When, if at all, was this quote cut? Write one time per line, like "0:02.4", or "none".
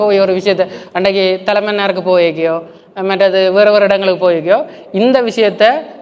none